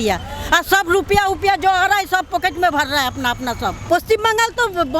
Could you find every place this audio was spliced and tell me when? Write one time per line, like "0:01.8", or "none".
0:03.9